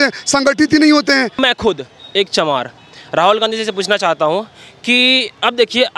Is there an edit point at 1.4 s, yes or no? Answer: yes